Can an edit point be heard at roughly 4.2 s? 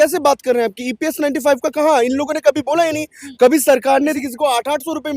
yes; 1 cut; at 4.2 s

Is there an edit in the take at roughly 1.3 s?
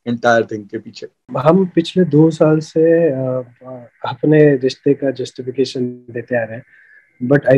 yes; 1 cut; at 1.3 s

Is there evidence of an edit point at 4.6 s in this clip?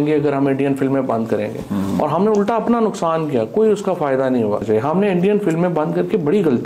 yes; 1 cut; at 4.6 s

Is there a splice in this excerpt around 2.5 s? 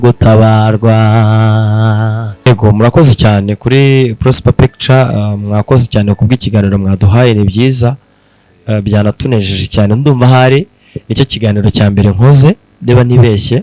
yes; 1 cut; at 2.5 s

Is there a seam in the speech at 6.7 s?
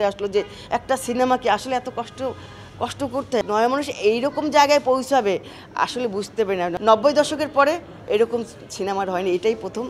yes; 2 cuts; at 3.4 s, 6.7 s

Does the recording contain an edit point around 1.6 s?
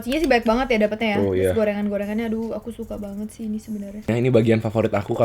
no; 1 cut; at 4.1 s

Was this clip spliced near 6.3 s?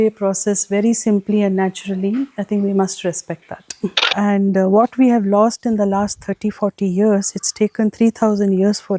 no; 1 cut; at 4.0 s

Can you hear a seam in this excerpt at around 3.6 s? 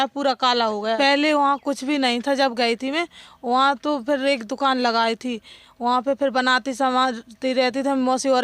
no; 1 cut; at 1.0 s

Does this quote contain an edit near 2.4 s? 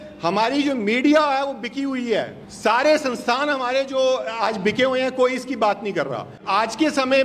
yes; 2 cuts; at 2.4 s, 6.4 s

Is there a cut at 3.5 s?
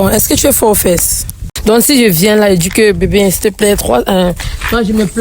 no; 1 cut; at 1.5 s

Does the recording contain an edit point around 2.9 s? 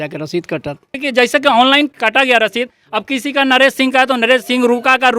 no; 1 cut; at 1.0 s

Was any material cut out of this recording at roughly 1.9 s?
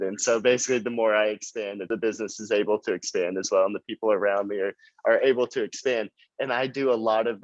yes; 1 cut; at 1.9 s

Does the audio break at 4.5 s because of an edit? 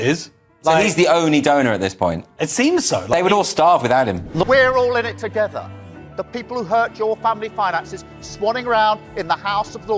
yes; 1 cut; at 4.5 s

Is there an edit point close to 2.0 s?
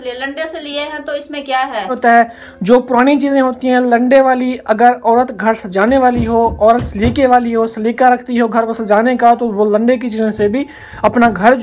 yes; 1 cut; at 2.0 s

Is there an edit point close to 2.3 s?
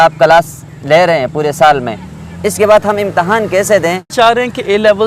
no; 1 cut; at 4.1 s

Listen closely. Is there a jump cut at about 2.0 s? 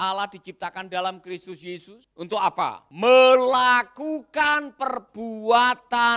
yes; 2 cuts; at 2.0 s, 2.9 s

